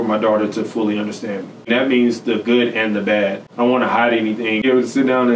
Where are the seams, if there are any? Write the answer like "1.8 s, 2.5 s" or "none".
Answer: 1.7 s, 3.4 s, 4.6 s